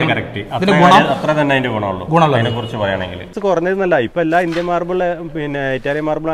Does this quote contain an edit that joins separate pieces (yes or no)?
yes